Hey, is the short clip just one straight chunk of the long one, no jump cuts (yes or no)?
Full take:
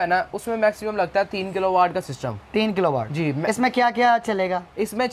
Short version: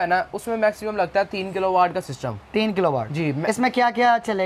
yes